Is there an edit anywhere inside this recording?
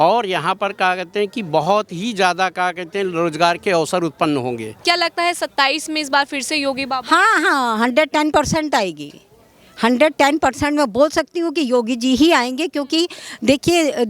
yes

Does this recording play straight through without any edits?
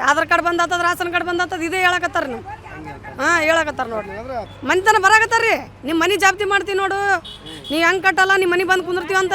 no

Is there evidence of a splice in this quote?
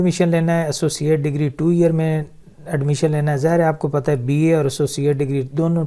no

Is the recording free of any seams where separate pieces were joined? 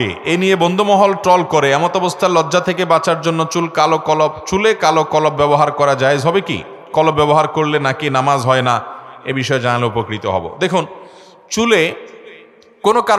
yes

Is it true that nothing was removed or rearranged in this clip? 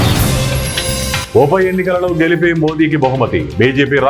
no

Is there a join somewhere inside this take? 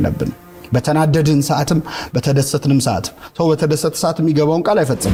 no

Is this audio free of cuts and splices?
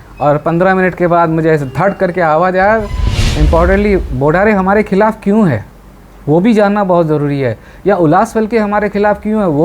no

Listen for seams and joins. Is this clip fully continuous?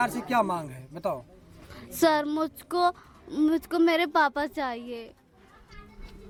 yes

